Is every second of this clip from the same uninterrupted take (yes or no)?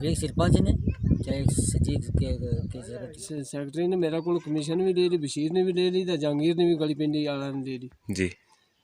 no